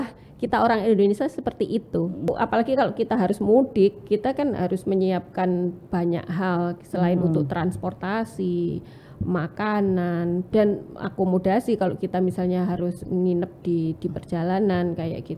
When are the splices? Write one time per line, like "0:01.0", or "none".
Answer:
0:02.3